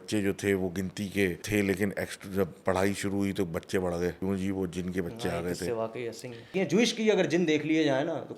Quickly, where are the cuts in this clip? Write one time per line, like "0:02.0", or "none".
0:01.4
0:04.2
0:06.5